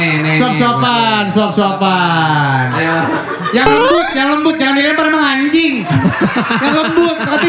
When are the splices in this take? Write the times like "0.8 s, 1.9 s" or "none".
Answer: none